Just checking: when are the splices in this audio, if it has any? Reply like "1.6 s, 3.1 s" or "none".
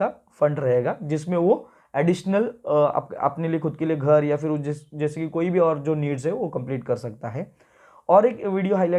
none